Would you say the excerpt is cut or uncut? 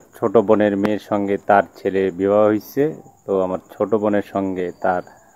uncut